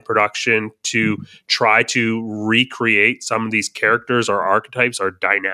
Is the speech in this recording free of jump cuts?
yes; 0 cuts

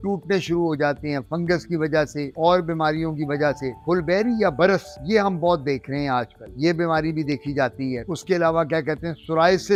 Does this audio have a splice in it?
no; 0 cuts

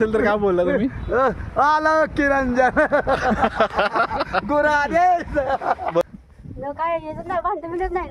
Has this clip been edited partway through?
yes; 1 cut; at 6.1 s

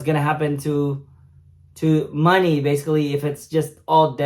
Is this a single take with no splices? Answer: yes; 0 cuts

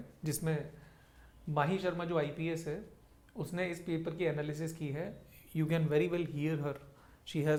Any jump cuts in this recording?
no; 0 cuts

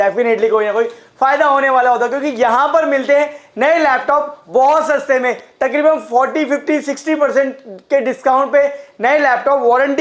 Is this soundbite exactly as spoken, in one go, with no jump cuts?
yes; 0 cuts

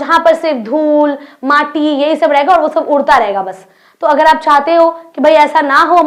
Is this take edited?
no; 0 cuts

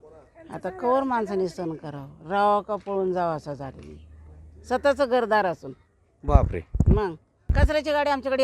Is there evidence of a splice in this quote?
yes; 1 cut; at 7.5 s

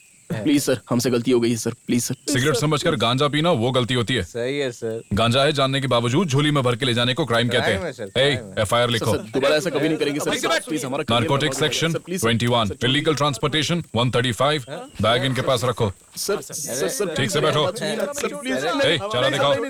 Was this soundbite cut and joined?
no; 0 cuts

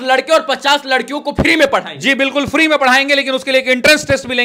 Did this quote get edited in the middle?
no; 0 cuts

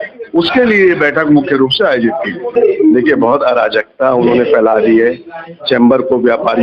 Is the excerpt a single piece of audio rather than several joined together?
no; 1 cut; at 2.5 s

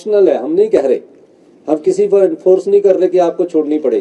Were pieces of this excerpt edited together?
no; 0 cuts

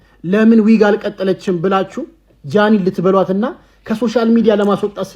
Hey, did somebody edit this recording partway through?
no; 0 cuts

